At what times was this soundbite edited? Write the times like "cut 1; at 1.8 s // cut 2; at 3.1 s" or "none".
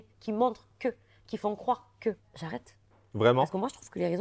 cut 1; at 2.3 s

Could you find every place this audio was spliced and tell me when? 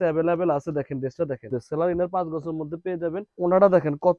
cut 1; at 1.5 s // cut 2; at 3.3 s

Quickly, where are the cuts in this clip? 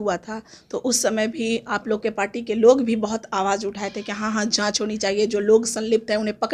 none

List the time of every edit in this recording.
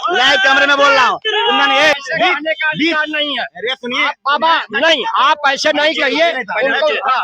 cut 1; at 1.9 s

